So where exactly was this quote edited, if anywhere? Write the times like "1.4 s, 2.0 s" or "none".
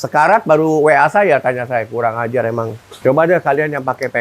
2.8 s

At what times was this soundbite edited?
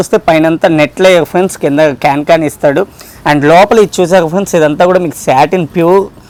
none

